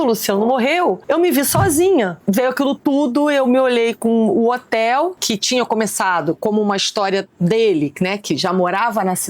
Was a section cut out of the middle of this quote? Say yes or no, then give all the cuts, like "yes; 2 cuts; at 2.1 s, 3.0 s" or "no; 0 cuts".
yes; 3 cuts; at 1.0 s, 2.2 s, 5.2 s